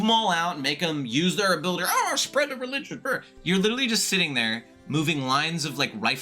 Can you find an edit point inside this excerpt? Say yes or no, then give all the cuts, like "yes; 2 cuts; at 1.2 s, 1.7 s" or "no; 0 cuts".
yes; 1 cut; at 3.3 s